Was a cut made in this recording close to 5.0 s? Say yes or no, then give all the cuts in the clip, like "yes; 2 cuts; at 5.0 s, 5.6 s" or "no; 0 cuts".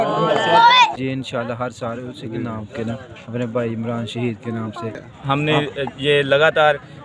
yes; 2 cuts; at 0.9 s, 5.0 s